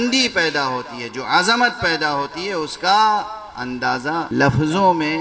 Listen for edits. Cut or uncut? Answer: cut